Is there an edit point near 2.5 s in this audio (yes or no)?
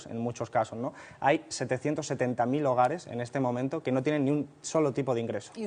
no